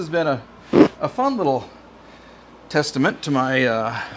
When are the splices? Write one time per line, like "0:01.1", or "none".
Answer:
none